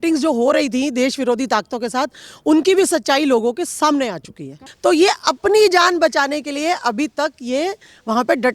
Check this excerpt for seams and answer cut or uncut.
cut